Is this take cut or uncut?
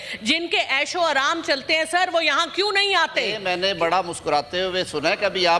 cut